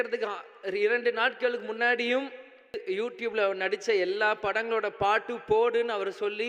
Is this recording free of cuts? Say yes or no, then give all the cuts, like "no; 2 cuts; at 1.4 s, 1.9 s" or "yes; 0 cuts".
no; 1 cut; at 2.8 s